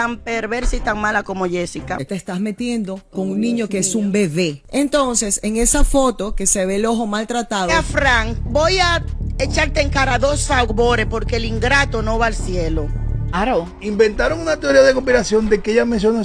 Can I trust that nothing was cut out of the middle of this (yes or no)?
no